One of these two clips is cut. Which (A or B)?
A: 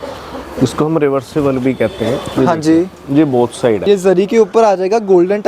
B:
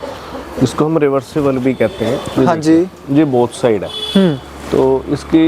A